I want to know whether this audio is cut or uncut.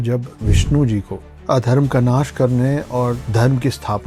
uncut